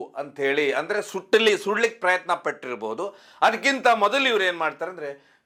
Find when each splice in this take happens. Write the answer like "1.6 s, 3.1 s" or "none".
none